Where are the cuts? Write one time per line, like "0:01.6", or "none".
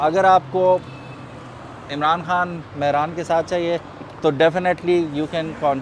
none